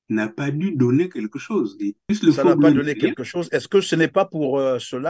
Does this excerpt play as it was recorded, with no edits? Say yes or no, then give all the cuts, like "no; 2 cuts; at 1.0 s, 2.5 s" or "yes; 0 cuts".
yes; 0 cuts